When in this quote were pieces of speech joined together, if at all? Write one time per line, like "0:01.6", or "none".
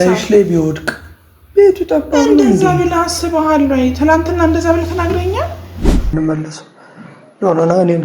0:06.1